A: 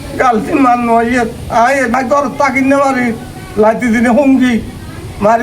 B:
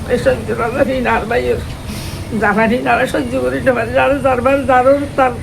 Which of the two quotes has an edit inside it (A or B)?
A